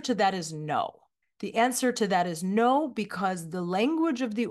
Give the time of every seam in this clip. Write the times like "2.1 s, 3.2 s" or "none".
none